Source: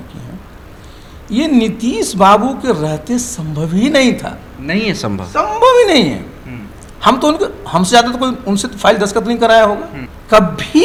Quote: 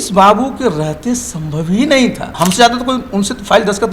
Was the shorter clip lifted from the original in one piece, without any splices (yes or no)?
no